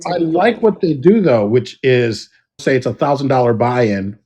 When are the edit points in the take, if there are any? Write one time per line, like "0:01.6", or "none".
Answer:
0:02.6